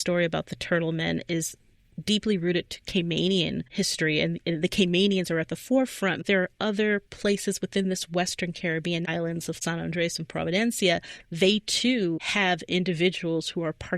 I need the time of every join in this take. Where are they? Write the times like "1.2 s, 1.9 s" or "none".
6.2 s, 9.1 s